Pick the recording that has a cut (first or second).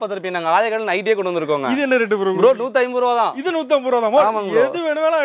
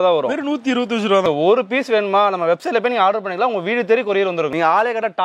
second